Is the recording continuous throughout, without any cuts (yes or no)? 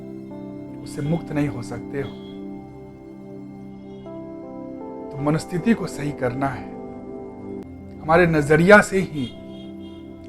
no